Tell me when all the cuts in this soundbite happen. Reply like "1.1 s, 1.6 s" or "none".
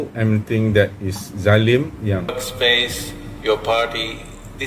2.3 s